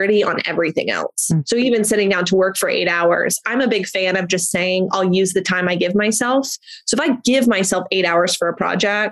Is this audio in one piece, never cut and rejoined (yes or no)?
yes